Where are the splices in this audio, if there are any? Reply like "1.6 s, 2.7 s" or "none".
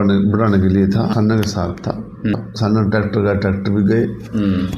1.1 s, 2.3 s